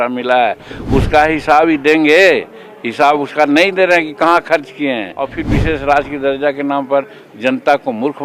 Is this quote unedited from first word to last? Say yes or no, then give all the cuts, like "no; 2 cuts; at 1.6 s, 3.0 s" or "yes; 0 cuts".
no; 1 cut; at 5.4 s